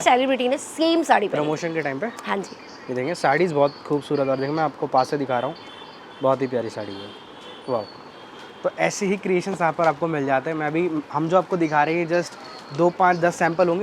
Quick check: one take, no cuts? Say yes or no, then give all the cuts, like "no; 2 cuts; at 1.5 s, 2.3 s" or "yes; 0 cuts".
yes; 0 cuts